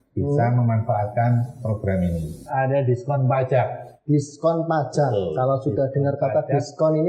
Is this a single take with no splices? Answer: no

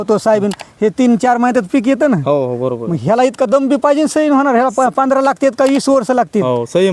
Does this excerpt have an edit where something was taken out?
no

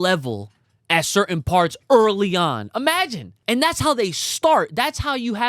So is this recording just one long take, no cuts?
no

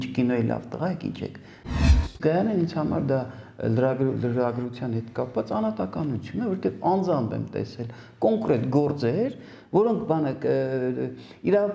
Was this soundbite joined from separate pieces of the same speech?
yes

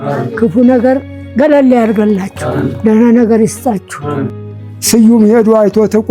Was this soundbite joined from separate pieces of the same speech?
yes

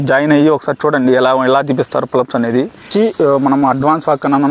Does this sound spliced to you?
yes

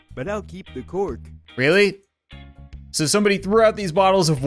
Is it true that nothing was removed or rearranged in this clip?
no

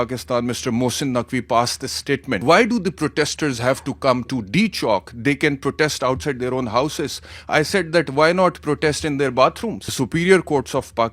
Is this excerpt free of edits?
no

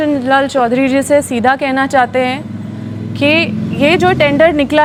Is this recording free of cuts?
yes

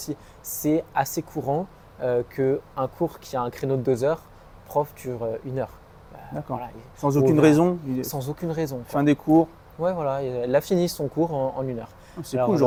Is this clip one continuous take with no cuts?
yes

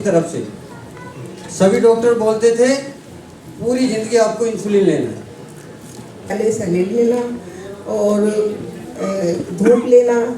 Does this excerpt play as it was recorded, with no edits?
no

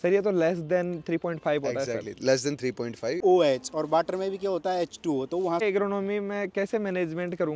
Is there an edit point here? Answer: yes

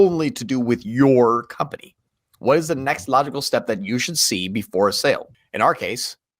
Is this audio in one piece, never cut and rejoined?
no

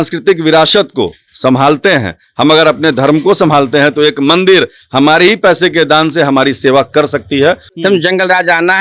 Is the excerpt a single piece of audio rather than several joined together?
no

